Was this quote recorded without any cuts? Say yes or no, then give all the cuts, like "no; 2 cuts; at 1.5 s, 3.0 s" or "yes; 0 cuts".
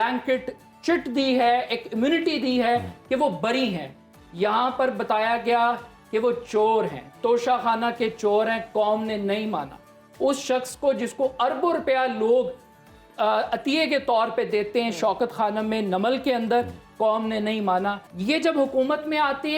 no; 1 cut; at 18.1 s